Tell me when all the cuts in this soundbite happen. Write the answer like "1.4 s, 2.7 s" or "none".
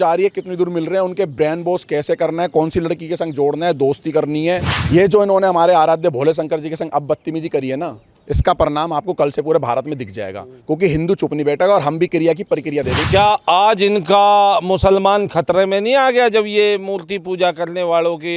4.7 s, 13.0 s